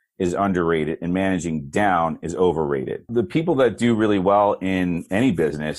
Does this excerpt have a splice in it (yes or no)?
yes